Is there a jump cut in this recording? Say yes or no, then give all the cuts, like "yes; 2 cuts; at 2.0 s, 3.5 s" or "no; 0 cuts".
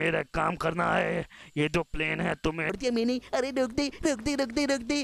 yes; 1 cut; at 2.7 s